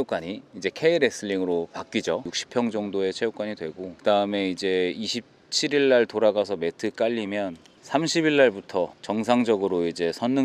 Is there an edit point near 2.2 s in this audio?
yes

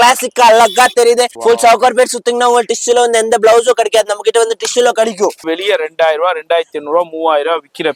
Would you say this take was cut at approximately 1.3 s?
yes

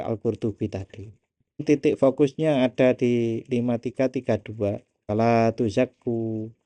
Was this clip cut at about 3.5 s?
no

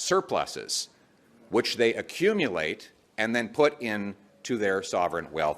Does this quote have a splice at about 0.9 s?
no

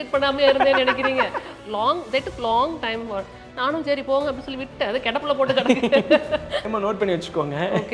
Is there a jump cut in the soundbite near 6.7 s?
yes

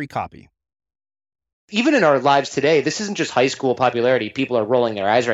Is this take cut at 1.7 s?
yes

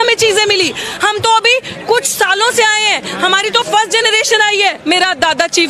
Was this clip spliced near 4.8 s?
yes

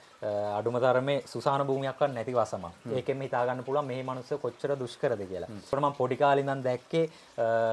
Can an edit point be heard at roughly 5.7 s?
yes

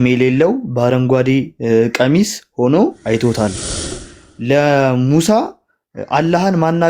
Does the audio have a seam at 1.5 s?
no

